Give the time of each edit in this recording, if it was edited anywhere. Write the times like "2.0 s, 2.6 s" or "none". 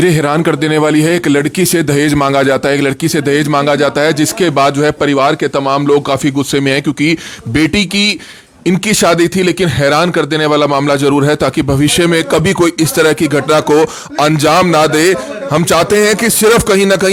none